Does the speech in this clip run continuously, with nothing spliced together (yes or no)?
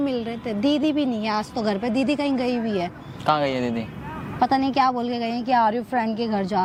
yes